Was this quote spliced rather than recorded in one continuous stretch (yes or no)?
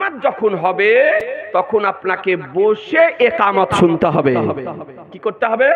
no